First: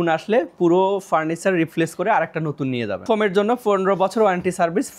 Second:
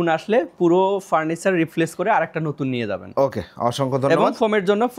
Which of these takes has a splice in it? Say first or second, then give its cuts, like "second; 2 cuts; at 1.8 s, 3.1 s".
first; 1 cut; at 3.0 s